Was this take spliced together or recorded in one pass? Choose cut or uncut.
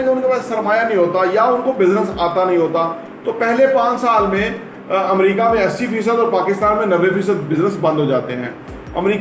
uncut